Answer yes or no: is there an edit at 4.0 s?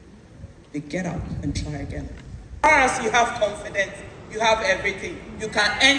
no